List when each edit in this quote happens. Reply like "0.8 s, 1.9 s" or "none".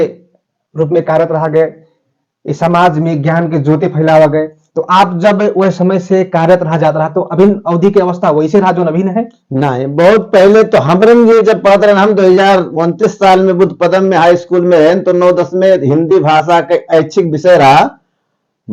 none